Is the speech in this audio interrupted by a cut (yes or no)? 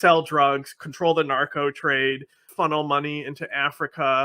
yes